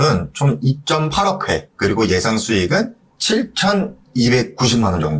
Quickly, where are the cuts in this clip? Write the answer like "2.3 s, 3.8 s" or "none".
1.7 s